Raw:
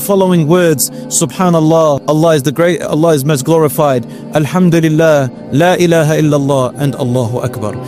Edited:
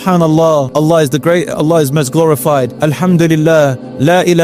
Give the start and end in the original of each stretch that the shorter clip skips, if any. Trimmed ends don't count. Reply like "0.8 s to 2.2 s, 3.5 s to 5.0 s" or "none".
4.0 s to 4.2 s